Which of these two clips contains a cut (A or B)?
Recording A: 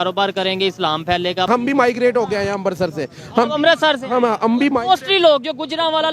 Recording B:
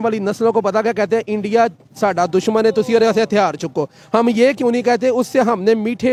A